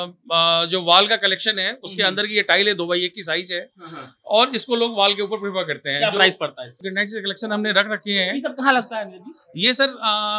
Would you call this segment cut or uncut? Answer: cut